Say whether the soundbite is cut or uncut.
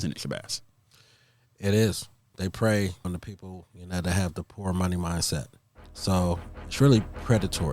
cut